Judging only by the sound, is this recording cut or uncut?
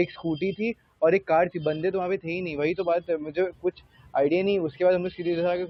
uncut